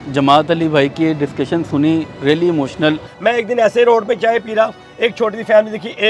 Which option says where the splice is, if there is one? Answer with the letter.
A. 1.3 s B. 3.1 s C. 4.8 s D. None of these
B